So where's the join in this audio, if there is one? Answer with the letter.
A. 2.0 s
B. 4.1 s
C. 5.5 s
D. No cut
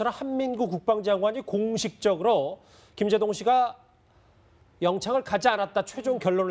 D